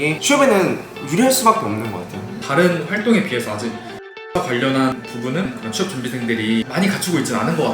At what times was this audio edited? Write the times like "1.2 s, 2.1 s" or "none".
2.4 s, 4.9 s, 6.7 s

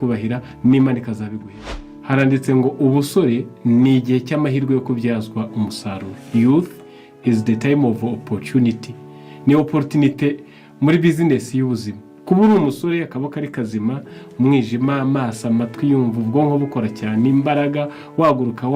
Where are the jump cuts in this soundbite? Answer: 1.5 s

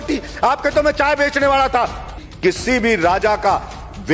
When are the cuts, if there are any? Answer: 2.2 s

